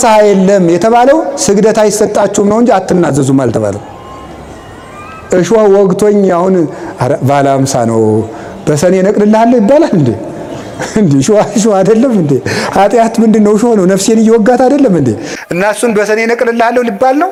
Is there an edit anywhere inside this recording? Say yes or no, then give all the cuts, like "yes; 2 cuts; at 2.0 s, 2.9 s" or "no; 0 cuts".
no; 0 cuts